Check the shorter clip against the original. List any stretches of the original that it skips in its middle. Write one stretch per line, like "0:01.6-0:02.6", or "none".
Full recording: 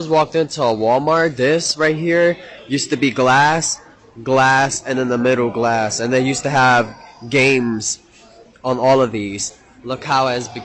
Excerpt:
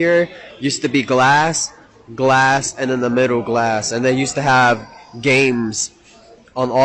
none